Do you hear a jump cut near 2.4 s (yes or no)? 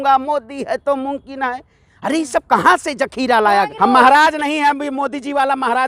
no